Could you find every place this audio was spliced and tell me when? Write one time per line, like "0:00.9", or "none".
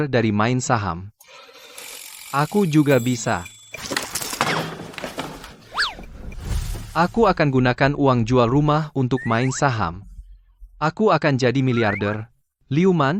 none

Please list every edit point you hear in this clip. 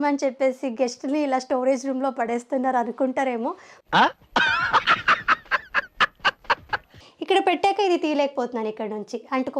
0:06.9

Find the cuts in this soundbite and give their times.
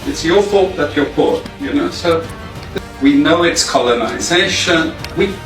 0:02.7

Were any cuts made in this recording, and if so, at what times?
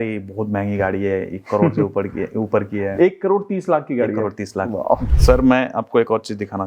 0:05.0

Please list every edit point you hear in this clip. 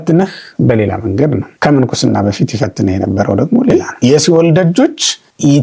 0:03.7

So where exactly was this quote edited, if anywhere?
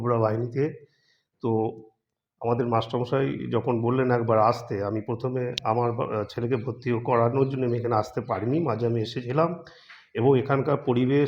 none

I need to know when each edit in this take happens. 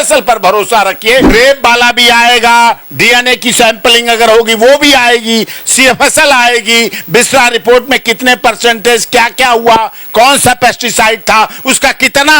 0:01.3

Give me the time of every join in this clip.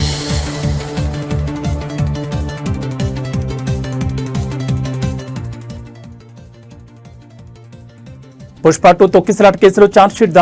0:08.1

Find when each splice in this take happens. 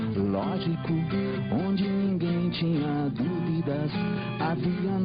none

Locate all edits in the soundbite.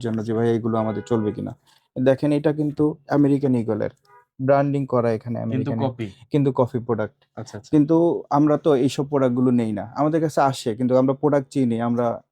none

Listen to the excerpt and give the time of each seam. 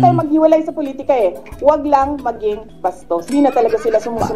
0:03.3

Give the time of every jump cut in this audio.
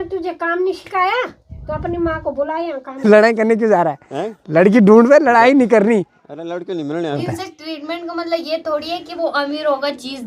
0:03.0
0:07.3

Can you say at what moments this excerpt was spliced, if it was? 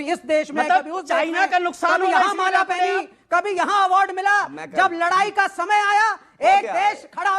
none

